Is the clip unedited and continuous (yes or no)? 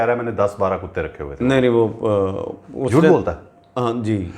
yes